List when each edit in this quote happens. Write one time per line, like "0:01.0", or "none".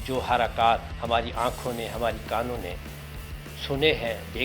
0:00.9